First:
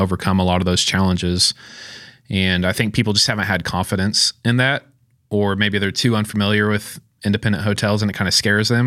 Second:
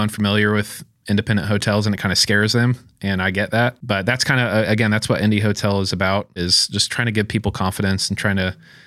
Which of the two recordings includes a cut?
second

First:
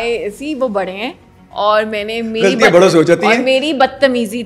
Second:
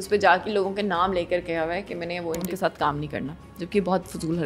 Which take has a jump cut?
second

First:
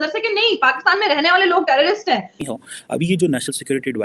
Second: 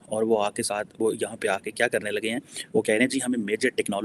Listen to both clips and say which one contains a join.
first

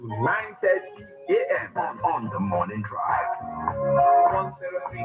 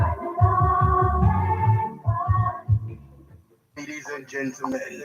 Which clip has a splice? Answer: second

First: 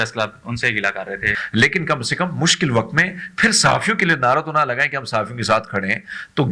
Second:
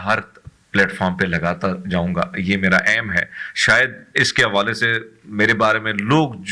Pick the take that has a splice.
first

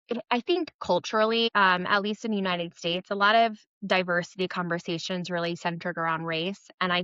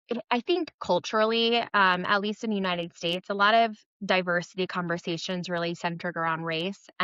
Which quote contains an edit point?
first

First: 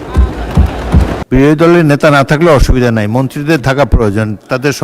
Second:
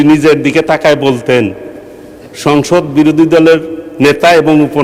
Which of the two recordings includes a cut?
first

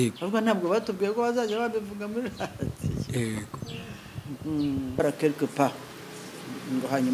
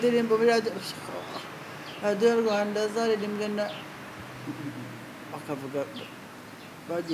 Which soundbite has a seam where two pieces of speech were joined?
first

